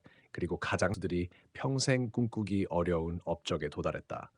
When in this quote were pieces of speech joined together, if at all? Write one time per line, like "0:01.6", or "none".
0:01.0